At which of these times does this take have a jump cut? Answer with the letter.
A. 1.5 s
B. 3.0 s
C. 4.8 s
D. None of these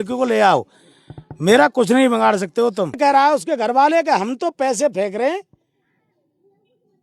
B